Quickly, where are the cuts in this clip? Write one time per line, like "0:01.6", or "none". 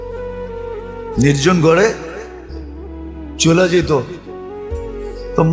0:01.1